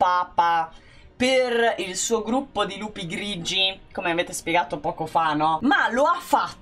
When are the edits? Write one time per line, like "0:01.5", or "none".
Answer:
0:05.6